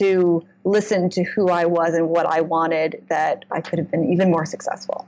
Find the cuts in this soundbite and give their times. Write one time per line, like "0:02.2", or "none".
0:03.5

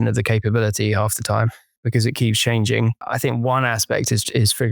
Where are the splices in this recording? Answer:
0:01.8
0:03.0

